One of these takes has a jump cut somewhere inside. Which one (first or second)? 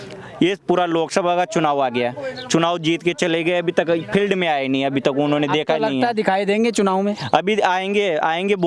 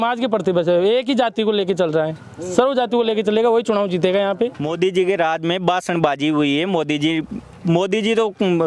second